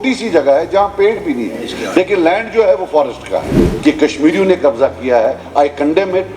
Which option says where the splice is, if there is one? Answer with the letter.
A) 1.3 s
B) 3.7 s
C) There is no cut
B